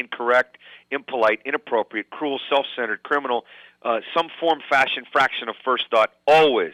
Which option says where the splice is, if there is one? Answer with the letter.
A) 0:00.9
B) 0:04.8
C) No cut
C